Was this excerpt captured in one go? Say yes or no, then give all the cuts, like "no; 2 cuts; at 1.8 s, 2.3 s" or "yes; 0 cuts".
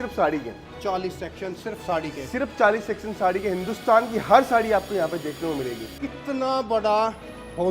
no; 1 cut; at 5.9 s